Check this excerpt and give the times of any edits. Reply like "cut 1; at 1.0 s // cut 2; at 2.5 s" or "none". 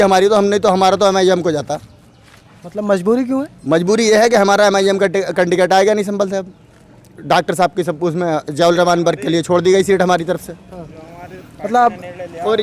none